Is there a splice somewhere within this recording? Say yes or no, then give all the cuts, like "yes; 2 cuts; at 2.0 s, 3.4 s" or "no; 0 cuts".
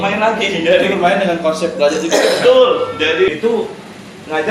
yes; 1 cut; at 3.3 s